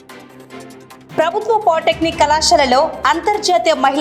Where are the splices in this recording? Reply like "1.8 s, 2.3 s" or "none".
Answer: none